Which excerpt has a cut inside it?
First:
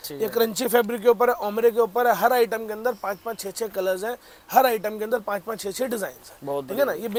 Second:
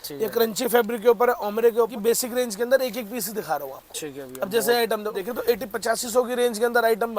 second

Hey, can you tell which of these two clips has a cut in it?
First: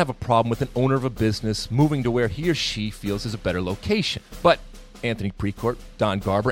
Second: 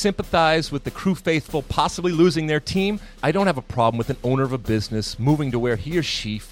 first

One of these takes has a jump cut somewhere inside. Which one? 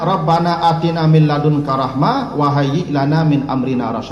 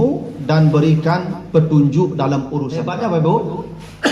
second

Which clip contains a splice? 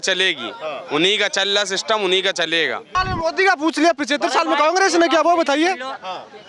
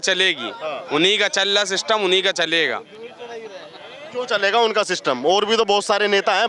first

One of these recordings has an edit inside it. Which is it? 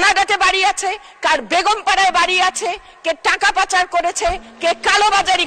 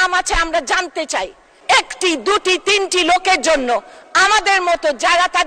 second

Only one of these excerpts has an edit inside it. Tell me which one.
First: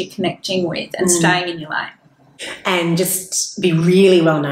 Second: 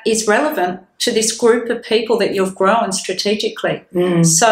first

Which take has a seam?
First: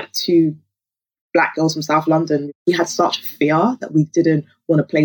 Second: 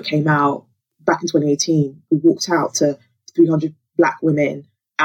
first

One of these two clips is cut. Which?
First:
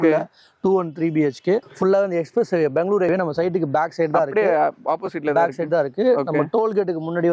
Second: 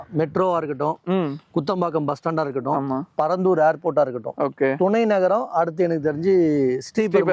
first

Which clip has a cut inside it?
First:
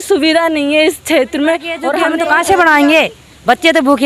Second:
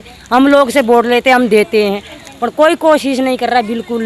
first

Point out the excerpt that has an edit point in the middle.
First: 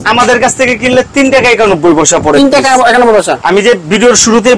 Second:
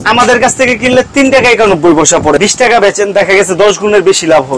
second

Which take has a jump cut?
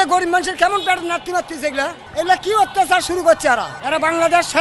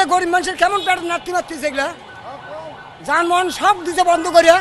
first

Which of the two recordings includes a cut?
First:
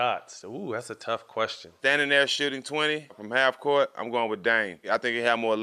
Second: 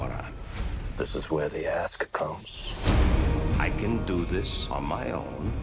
first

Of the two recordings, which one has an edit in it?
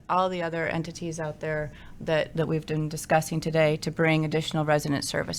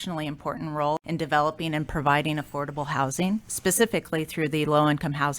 second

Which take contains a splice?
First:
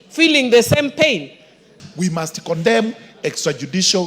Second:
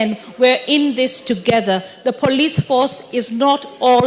first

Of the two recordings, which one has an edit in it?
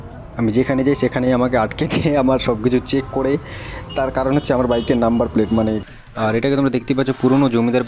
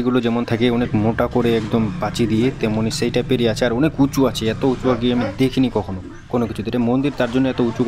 first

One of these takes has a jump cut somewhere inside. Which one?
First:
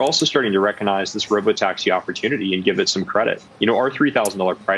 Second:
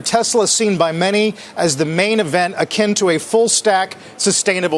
first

